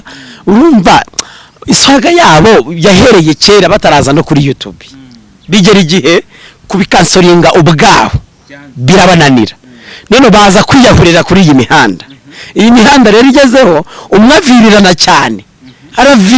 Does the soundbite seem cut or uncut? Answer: uncut